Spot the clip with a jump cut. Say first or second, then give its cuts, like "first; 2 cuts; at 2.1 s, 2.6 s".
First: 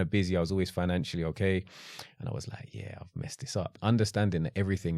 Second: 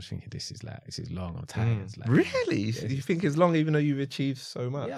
first; 1 cut; at 3.8 s